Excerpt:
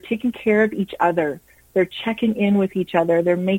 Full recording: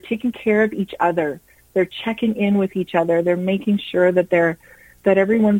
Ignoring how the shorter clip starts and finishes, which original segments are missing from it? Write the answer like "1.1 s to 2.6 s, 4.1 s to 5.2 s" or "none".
none